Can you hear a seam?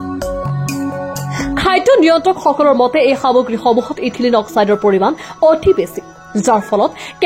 no; 0 cuts

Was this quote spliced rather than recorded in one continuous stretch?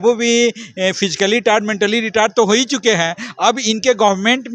no; 0 cuts

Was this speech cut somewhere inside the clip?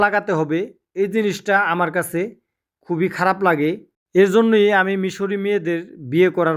no; 0 cuts

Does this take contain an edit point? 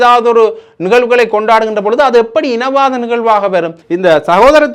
yes; 1 cut; at 3.8 s

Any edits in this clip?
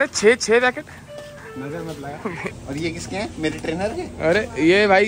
yes; 1 cut; at 2.5 s

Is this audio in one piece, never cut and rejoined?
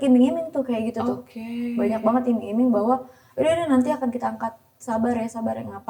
yes; 0 cuts

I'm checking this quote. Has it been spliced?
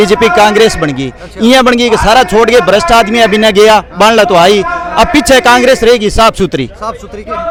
no; 0 cuts

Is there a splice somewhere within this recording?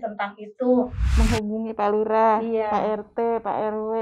yes; 1 cut; at 1.0 s

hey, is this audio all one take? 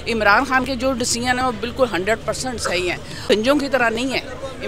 no; 1 cut; at 3.3 s

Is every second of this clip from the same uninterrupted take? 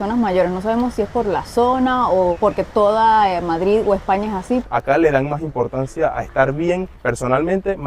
no; 3 cuts; at 2.4 s, 4.6 s, 7.0 s

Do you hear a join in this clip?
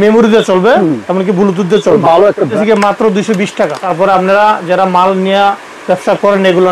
yes; 2 cuts; at 2.5 s, 3.8 s

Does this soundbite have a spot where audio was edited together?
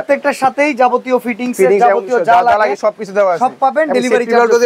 no; 0 cuts

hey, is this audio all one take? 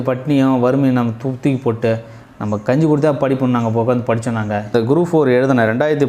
no; 1 cut; at 4.7 s

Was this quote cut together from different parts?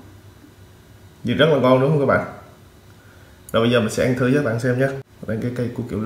yes; 1 cut; at 5.1 s

